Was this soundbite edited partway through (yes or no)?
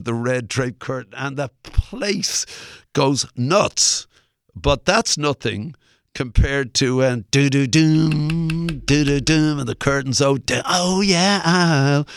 no